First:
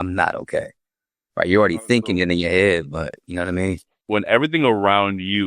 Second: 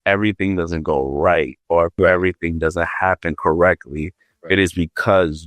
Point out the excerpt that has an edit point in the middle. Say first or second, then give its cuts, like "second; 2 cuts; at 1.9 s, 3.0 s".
first; 1 cut; at 3.9 s